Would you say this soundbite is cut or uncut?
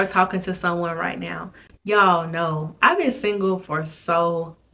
uncut